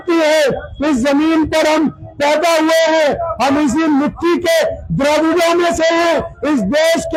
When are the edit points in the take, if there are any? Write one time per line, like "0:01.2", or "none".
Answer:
none